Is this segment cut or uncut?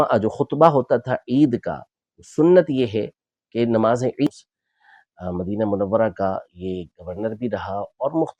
cut